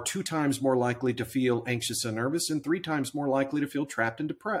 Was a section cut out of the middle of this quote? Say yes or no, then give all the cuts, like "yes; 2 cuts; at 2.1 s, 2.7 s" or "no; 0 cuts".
no; 0 cuts